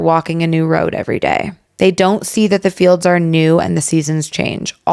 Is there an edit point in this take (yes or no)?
no